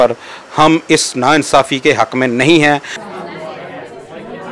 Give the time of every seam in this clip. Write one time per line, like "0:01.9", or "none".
0:02.9